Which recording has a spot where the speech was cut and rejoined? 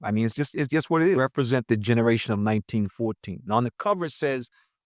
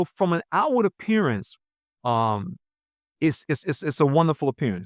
first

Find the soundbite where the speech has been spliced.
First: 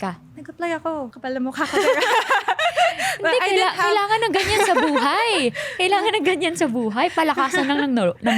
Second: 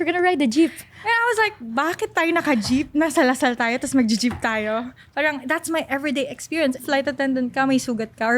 second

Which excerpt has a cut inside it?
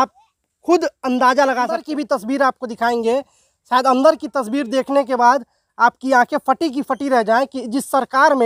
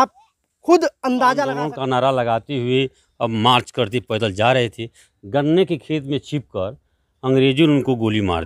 second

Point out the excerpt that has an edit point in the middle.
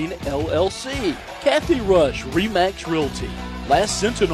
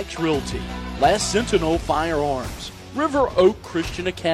first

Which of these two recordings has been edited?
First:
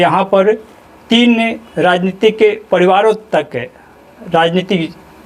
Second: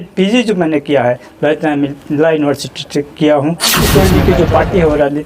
second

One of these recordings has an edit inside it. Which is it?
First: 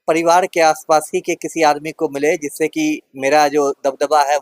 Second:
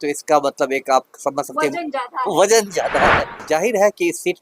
second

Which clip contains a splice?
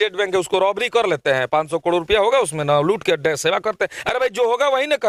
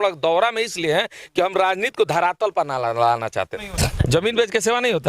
second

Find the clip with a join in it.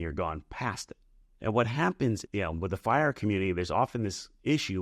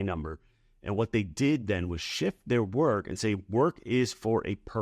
first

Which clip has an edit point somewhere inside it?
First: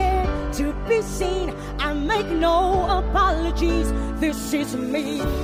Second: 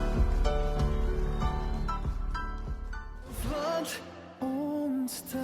second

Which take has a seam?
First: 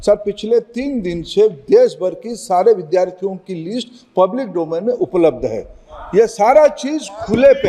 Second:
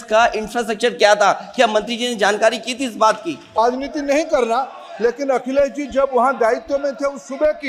second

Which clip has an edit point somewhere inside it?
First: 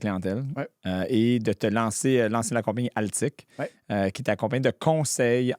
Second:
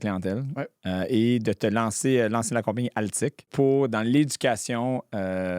second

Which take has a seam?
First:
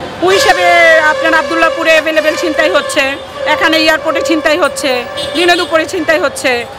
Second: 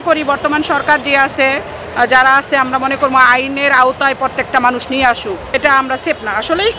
second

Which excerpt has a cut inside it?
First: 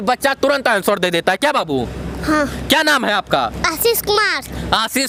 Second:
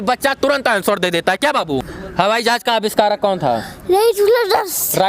second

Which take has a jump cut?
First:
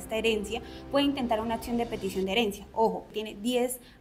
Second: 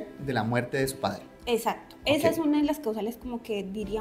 first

